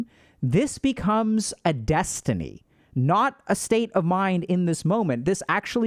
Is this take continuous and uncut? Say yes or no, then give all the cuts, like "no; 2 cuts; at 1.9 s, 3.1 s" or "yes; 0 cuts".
yes; 0 cuts